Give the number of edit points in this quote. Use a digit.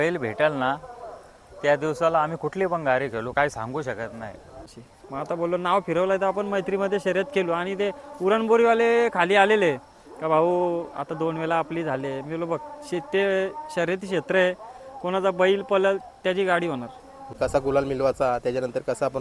2